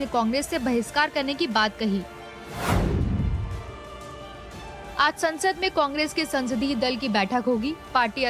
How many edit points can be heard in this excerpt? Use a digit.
0